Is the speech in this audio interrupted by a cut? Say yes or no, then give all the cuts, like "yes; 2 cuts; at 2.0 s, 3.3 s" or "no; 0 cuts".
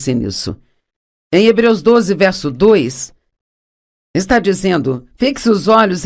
no; 0 cuts